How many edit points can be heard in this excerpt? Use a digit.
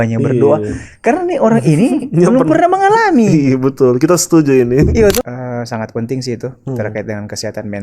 1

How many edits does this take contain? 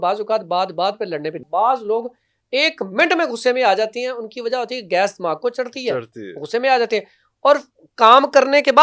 1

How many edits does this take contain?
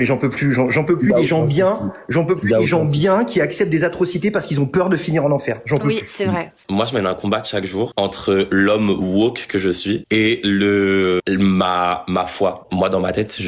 5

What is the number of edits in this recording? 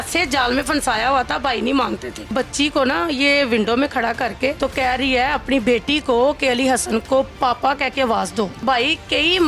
3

